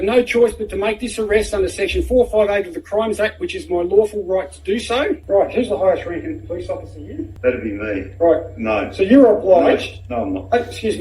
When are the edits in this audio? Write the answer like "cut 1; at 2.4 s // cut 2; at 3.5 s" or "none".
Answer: cut 1; at 5.2 s // cut 2; at 7.2 s